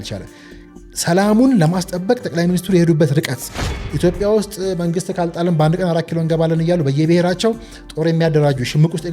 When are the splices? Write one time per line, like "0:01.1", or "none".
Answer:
0:03.8